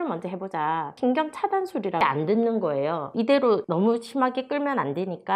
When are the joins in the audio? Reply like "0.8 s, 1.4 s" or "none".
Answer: 0.9 s, 2.0 s, 3.5 s

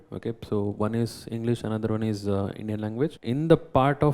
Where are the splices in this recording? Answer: 3.2 s

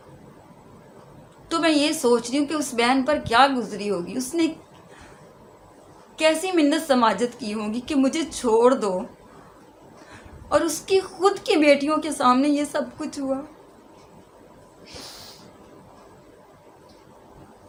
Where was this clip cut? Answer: none

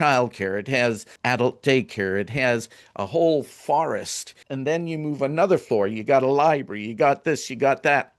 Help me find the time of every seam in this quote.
1.1 s, 4.4 s

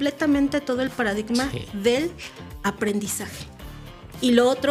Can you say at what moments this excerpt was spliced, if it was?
none

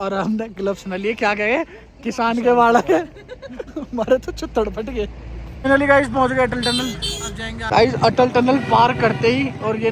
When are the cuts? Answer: 5.6 s, 7.6 s

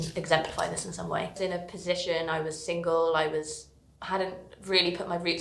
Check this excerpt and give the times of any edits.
1.3 s

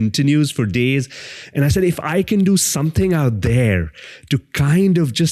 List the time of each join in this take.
none

